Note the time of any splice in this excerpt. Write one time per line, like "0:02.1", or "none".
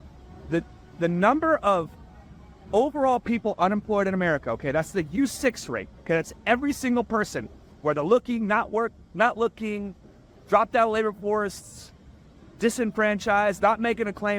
none